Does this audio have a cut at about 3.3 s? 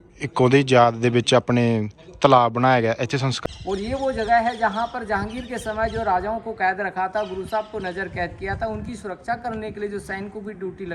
yes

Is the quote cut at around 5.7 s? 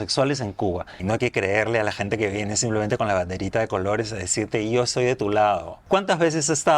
yes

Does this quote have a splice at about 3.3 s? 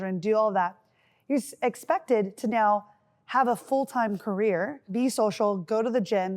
no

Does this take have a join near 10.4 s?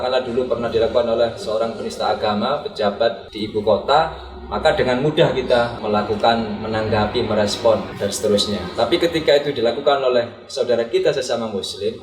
no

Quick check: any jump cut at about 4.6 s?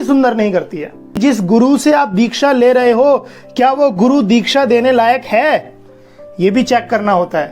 no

